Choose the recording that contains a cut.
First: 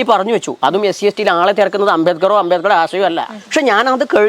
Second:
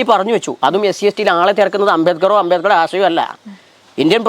first; 1 cut; at 3.3 s

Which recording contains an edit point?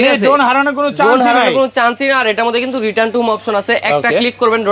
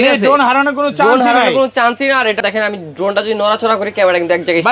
second; 1 cut; at 2.4 s

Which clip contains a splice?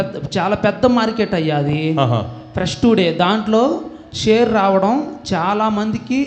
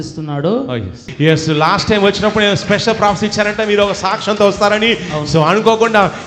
second; 1 cut; at 1.1 s

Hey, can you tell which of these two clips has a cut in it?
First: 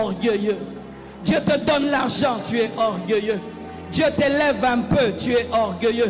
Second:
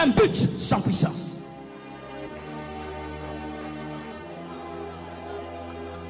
second; 1 cut; at 1.9 s

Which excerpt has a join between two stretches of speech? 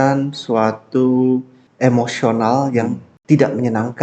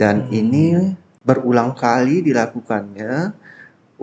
first; 2 cuts; at 1.6 s, 3.1 s

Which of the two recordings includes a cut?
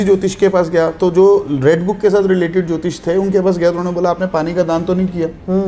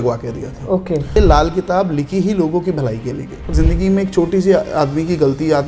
second; 2 cuts; at 1.2 s, 3.5 s

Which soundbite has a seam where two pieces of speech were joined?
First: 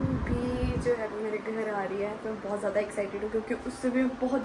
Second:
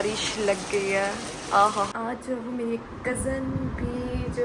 second; 1 cut; at 1.9 s

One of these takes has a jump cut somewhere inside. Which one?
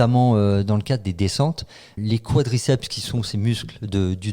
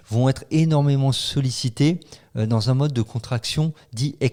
first; 1 cut; at 1.9 s

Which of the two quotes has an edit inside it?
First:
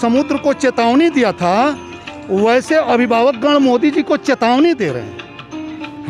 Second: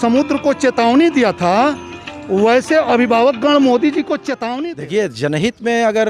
second; 1 cut; at 4.3 s

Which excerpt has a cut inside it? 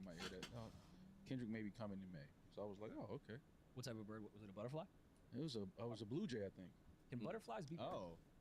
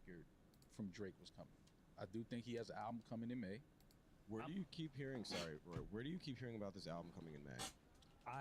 second; 2 cuts; at 1.8 s, 4.2 s

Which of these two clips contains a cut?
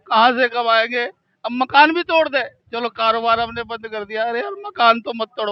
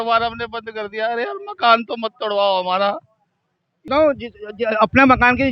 second; 1 cut; at 3.8 s

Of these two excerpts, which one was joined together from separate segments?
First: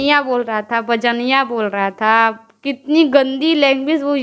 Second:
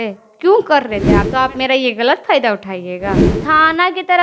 second; 2 cuts; at 1.2 s, 3.3 s

